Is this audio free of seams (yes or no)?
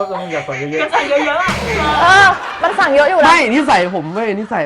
yes